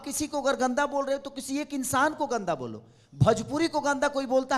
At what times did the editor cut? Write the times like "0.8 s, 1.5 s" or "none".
none